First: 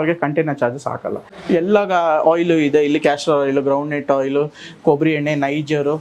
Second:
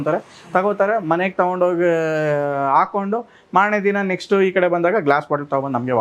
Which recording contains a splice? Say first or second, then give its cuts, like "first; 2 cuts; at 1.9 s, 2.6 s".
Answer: first; 1 cut; at 1.3 s